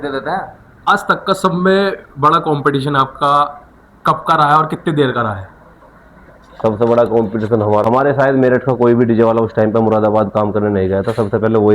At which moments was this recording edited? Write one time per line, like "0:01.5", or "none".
0:00.9
0:07.8